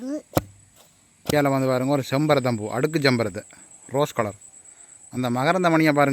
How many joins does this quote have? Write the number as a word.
one